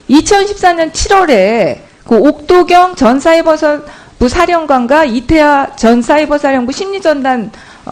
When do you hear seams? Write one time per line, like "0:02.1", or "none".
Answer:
0:05.1